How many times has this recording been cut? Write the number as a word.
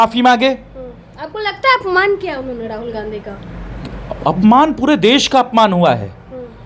zero